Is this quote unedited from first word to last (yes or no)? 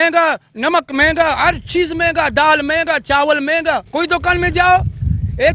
no